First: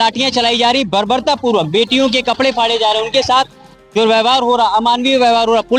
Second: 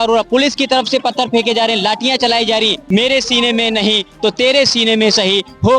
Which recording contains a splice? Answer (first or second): second